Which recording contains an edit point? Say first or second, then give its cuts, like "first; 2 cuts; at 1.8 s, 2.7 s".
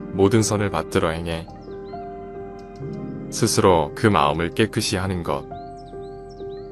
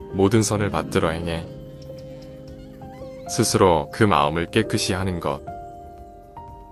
first; 3 cuts; at 1.5 s, 3.4 s, 5.6 s